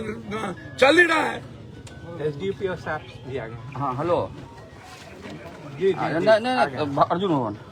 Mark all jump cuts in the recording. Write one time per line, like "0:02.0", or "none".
none